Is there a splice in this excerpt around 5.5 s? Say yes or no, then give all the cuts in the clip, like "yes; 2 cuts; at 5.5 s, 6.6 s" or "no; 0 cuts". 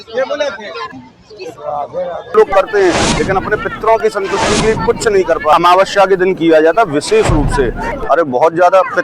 yes; 3 cuts; at 2.3 s, 5.5 s, 7.9 s